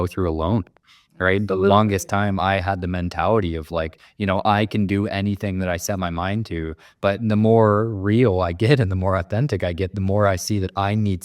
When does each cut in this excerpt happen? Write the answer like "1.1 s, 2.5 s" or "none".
none